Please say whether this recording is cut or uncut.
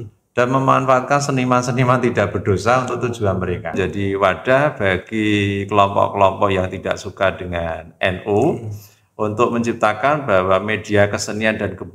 cut